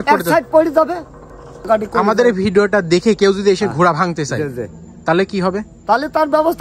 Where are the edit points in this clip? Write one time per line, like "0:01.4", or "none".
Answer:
0:01.7